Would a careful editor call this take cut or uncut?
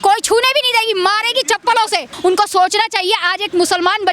cut